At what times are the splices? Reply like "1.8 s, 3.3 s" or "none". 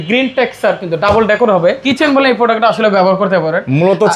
1.8 s